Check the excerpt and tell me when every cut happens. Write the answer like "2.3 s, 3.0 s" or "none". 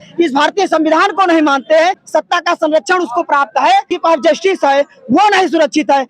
2.0 s, 3.9 s